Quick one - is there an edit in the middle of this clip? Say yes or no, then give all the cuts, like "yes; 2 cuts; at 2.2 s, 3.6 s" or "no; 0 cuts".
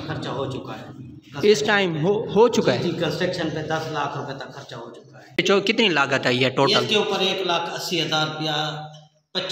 yes; 1 cut; at 5.4 s